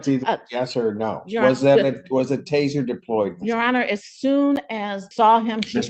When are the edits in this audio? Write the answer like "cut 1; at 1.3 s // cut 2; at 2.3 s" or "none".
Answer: cut 1; at 5.0 s